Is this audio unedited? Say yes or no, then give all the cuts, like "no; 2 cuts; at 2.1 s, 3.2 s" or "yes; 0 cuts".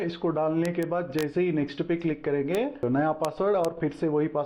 no; 1 cut; at 2.8 s